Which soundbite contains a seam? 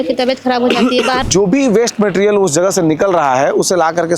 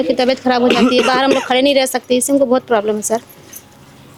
first; 1 cut; at 1.2 s

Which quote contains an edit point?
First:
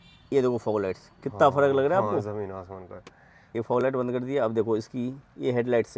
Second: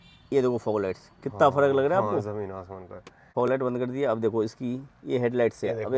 second; 1 cut; at 3.2 s

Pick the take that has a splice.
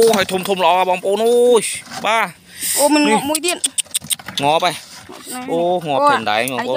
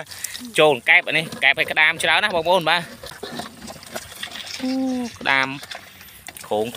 second; 1 cut; at 3.0 s

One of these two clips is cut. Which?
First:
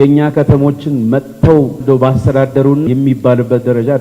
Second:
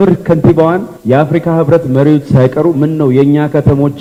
first; 2 cuts; at 1.8 s, 2.9 s

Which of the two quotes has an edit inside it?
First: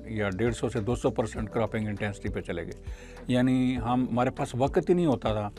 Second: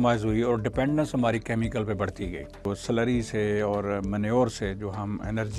second; 1 cut; at 2.7 s

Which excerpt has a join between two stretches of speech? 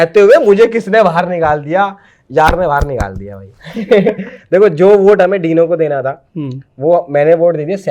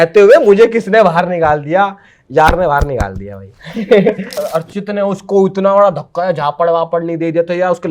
second; 1 cut; at 4.4 s

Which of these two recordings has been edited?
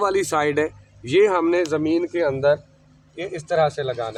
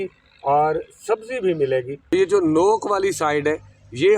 second; 1 cut; at 2.0 s

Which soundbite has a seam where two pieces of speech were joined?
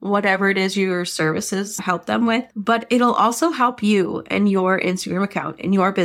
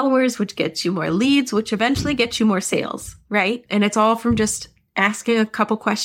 second; 1 cut; at 3.6 s

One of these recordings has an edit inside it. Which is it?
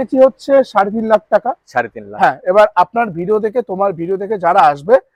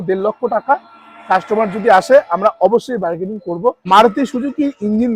second; 1 cut; at 3.8 s

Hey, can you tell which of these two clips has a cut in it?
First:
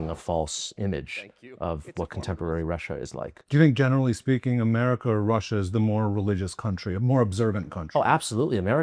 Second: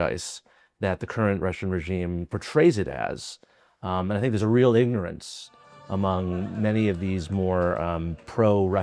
first; 1 cut; at 3.4 s

